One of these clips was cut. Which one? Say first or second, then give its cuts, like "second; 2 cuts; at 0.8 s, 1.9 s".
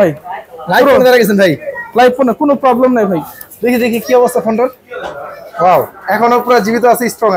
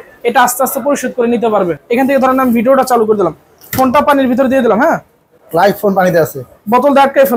second; 1 cut; at 1.8 s